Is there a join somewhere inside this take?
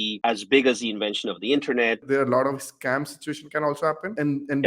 yes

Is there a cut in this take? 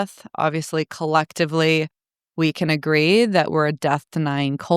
no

